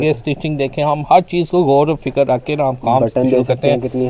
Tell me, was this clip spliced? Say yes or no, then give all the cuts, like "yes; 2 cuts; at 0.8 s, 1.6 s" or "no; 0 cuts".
no; 0 cuts